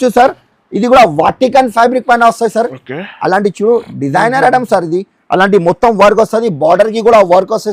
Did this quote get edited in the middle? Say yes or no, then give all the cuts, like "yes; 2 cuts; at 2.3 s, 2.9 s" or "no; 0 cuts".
no; 0 cuts